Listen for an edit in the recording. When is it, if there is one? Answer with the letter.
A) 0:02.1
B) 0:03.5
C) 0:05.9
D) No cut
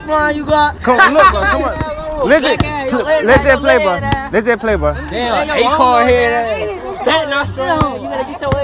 D